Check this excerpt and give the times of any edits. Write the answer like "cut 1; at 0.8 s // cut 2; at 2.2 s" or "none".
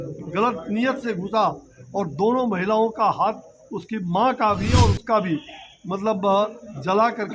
none

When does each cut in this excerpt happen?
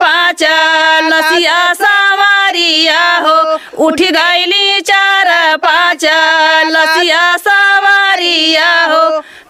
none

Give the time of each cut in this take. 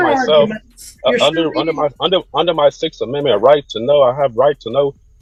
none

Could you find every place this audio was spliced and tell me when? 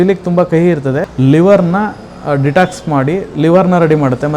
cut 1; at 1.1 s

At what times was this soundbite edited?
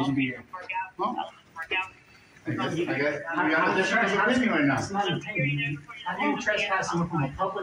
none

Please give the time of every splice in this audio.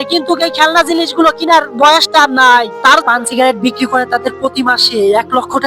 cut 1; at 3.0 s

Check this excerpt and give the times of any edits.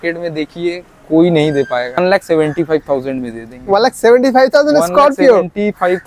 cut 1; at 2.0 s

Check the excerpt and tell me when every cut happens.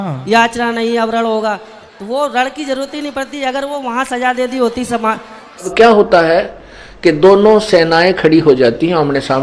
cut 1; at 5.7 s

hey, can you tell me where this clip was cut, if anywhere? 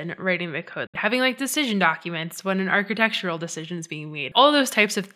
cut 1; at 0.9 s // cut 2; at 4.2 s

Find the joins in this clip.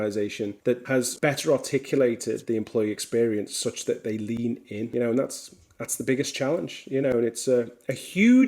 cut 1; at 1.0 s // cut 2; at 4.9 s

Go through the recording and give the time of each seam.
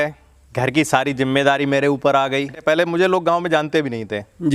cut 1; at 2.6 s

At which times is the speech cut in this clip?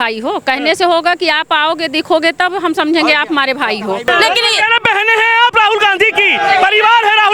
cut 1; at 4.1 s

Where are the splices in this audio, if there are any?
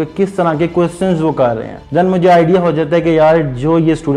cut 1; at 1.7 s

